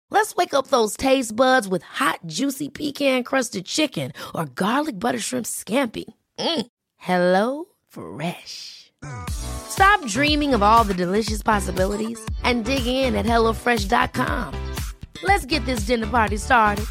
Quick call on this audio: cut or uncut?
uncut